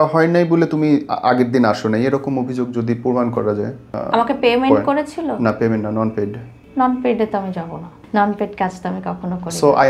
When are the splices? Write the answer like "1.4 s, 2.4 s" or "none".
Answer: none